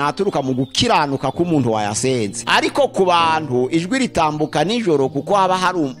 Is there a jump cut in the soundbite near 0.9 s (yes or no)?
no